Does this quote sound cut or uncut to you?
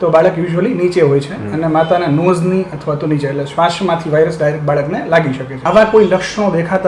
cut